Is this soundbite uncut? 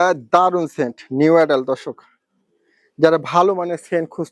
yes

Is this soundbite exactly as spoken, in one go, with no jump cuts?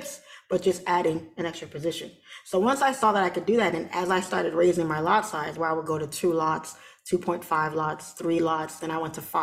yes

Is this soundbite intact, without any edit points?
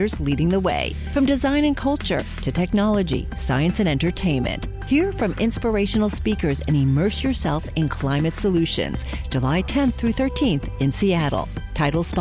yes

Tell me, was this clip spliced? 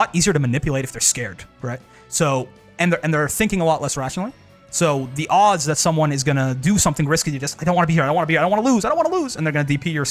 no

